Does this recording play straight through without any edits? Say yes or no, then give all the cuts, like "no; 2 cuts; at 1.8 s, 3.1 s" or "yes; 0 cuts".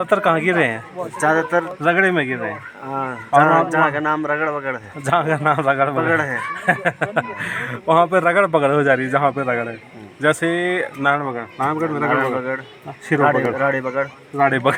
yes; 0 cuts